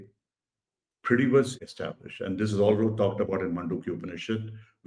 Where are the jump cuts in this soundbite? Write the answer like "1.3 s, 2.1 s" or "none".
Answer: 1.6 s